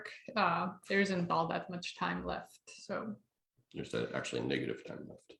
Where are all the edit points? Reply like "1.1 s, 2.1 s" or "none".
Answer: none

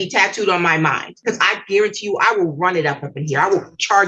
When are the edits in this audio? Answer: 1.1 s

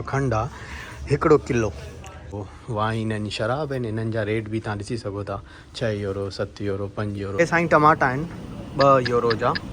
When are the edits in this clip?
2.3 s, 7.3 s

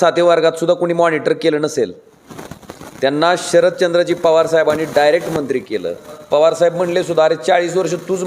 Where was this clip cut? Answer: 6.2 s

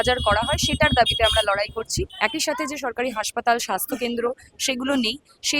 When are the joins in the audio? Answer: 2.0 s

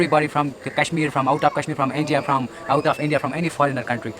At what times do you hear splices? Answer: none

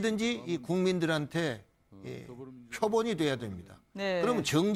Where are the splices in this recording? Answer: none

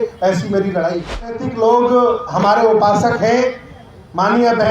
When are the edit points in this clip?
1.5 s

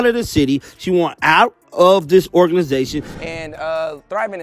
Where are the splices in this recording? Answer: 3.2 s

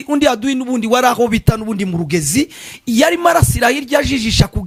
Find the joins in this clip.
none

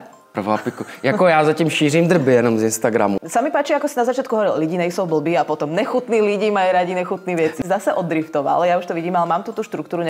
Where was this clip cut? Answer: 3.2 s, 7.6 s

